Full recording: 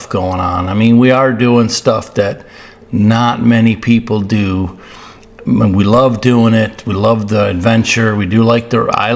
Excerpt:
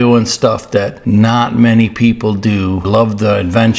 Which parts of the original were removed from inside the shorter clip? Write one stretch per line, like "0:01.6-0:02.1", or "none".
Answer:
0:02.4-0:02.8
0:04.7-0:06.9